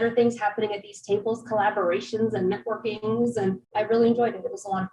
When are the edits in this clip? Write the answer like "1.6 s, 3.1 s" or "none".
3.7 s